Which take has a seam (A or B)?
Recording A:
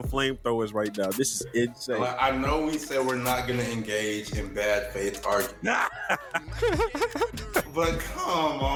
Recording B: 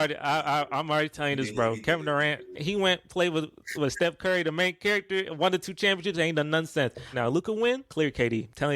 B